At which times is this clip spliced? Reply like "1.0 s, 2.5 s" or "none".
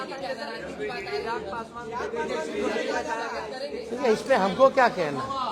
none